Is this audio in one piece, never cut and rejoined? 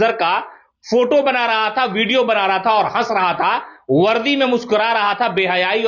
yes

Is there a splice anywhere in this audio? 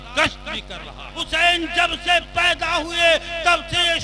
yes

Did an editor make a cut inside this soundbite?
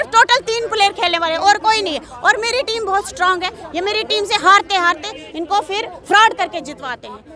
no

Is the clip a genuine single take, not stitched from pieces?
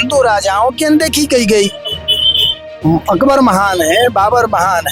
yes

